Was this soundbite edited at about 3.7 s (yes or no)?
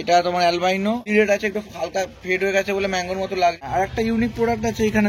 yes